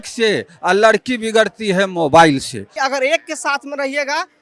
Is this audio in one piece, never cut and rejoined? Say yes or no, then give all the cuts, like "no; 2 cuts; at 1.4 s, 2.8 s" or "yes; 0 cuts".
no; 1 cut; at 2.8 s